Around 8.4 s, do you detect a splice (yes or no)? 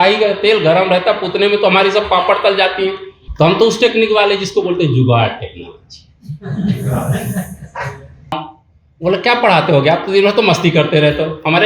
yes